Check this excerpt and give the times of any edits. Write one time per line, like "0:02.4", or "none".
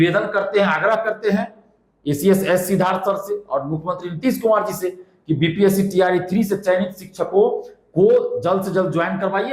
none